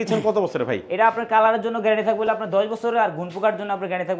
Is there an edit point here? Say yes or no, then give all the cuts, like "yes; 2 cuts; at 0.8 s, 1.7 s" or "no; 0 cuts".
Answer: no; 0 cuts